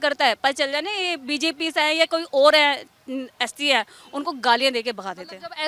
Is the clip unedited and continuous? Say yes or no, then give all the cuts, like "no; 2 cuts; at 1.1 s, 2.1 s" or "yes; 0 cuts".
yes; 0 cuts